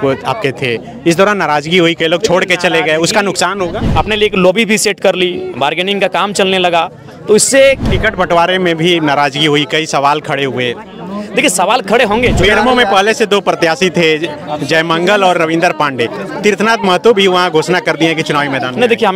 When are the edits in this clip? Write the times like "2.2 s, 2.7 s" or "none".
3.8 s, 7.8 s, 12.4 s